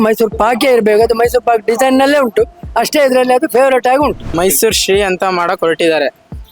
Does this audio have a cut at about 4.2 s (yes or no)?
yes